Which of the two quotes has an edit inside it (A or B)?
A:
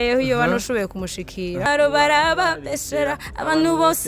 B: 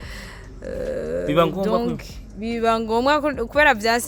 A